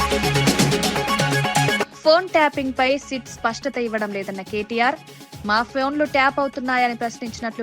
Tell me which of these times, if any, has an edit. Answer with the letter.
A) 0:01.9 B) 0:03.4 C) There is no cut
A